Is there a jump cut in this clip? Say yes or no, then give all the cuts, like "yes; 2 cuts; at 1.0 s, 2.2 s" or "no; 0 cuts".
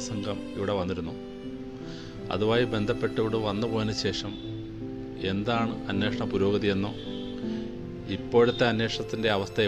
no; 0 cuts